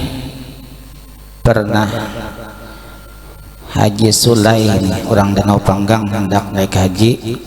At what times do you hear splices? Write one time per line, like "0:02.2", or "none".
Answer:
none